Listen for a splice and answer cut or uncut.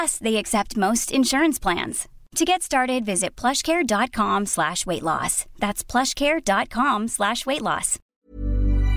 cut